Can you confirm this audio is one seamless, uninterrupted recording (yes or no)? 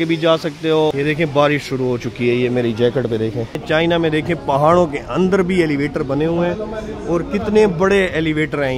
no